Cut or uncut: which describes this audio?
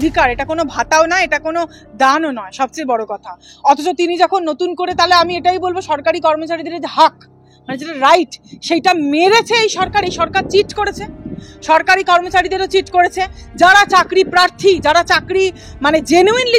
uncut